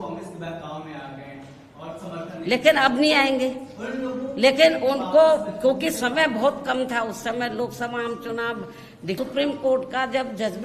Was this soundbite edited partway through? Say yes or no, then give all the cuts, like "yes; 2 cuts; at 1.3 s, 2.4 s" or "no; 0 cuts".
yes; 1 cut; at 9.2 s